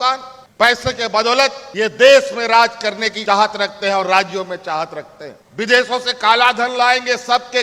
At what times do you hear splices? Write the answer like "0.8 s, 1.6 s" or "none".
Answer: 1.6 s, 3.1 s, 5.4 s